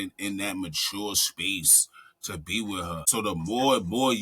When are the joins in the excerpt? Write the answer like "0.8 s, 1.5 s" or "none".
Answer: 3.0 s